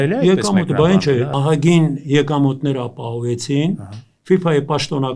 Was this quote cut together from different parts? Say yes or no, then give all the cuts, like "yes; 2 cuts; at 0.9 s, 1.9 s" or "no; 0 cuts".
yes; 1 cut; at 1.3 s